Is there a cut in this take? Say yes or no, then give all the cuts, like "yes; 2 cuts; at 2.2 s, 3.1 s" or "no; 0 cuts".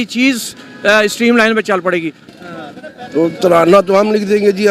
yes; 1 cut; at 2.2 s